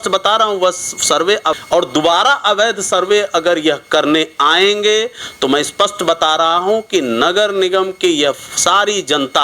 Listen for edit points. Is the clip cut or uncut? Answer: cut